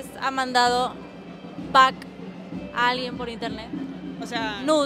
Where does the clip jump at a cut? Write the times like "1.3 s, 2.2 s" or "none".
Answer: none